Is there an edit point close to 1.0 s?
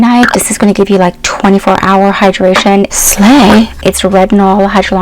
no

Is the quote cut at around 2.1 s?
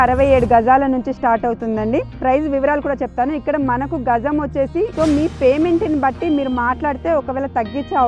yes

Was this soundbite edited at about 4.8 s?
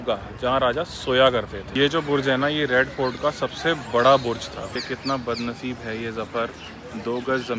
yes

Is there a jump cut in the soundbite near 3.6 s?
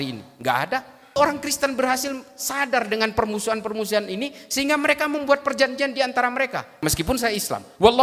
no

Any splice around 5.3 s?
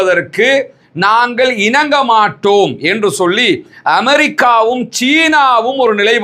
no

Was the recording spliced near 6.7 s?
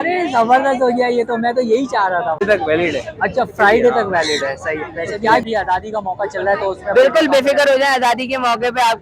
no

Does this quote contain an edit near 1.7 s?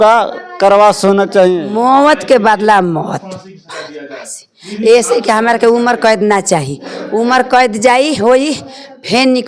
yes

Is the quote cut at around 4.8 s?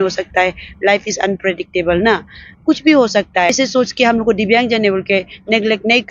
no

